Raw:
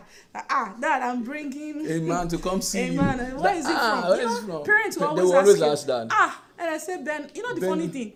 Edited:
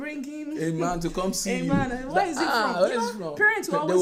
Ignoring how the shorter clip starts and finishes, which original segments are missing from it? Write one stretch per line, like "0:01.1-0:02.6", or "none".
none

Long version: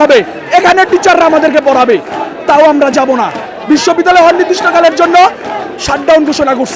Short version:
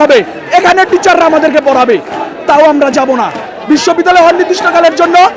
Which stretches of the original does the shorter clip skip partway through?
none

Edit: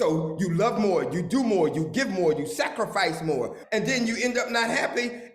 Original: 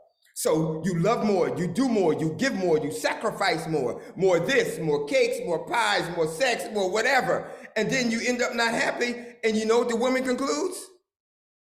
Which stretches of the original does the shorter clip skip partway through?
0:04.0-0:07.6

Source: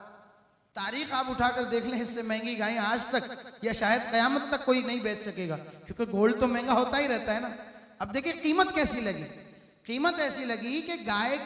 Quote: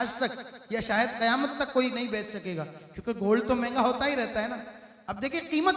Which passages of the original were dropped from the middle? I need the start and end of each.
none

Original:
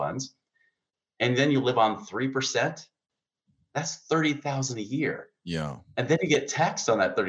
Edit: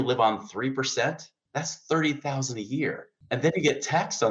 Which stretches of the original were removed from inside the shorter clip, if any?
0:02.9-0:03.5
0:05.3-0:05.8

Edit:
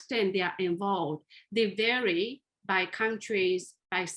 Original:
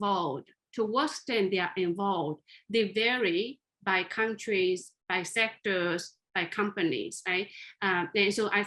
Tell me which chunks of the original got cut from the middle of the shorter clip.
none

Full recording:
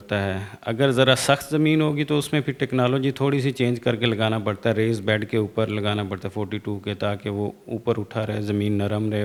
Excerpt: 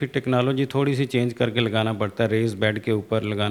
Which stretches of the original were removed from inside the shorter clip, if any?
none

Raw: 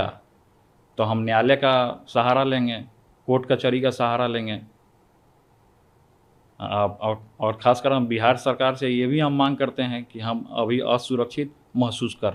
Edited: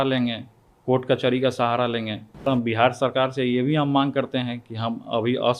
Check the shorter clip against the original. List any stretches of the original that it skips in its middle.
0:04.9-0:07.9

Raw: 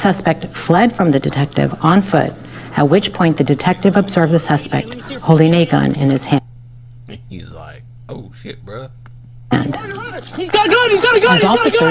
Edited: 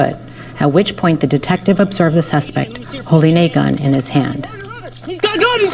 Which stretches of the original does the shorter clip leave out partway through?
0:06.4-0:09.6

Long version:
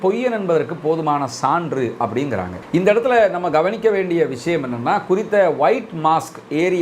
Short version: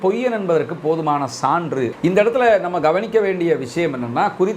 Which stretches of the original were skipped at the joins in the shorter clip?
0:01.9-0:02.6

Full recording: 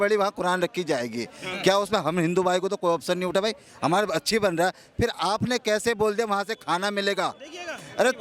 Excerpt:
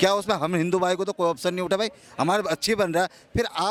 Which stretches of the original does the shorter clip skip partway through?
none

